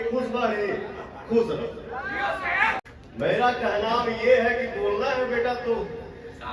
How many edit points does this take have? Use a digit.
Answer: 1